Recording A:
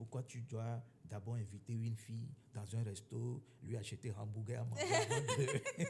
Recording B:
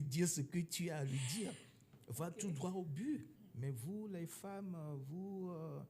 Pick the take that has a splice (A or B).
B